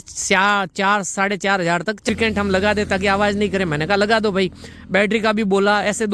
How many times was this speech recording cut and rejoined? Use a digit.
1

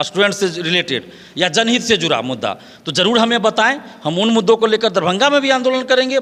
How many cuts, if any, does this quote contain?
0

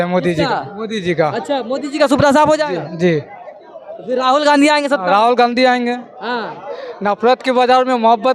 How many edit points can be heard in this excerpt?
0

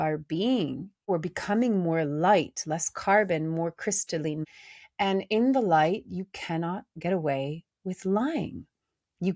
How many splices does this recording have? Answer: 2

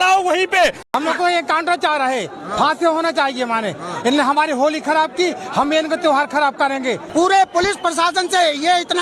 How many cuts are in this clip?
2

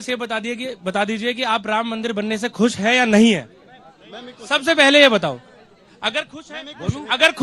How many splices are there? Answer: 0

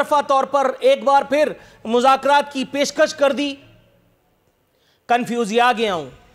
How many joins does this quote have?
0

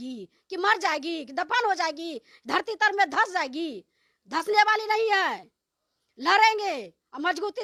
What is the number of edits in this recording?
0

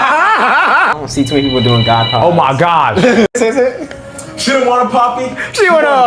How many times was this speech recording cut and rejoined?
2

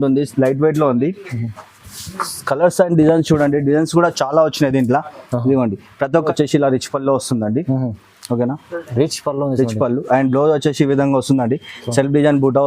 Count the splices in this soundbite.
1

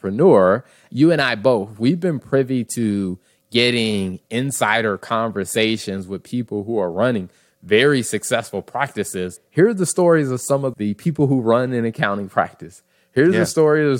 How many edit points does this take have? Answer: 3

